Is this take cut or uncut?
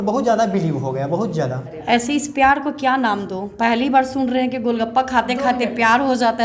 cut